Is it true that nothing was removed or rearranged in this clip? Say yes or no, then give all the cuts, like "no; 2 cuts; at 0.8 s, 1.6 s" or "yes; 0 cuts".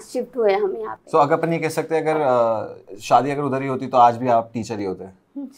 yes; 0 cuts